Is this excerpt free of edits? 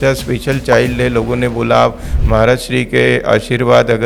yes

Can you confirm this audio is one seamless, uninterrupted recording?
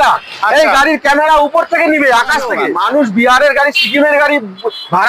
no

